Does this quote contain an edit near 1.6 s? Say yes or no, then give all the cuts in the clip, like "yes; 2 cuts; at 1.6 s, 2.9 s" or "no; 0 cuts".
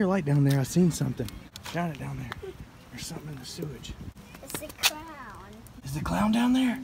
yes; 3 cuts; at 1.6 s, 4.2 s, 5.7 s